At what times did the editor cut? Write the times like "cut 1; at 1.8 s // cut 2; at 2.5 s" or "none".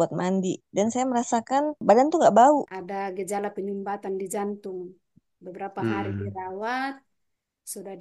cut 1; at 1.8 s // cut 2; at 2.8 s